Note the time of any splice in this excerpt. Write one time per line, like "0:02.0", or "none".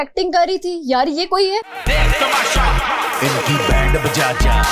0:01.8